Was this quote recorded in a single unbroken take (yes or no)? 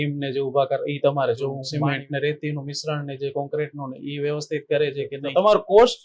no